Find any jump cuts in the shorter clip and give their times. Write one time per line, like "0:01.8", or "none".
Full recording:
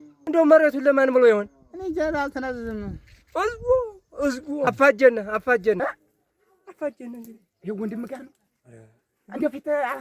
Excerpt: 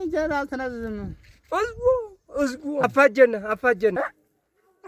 none